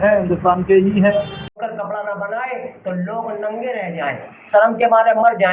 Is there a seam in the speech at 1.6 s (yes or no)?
yes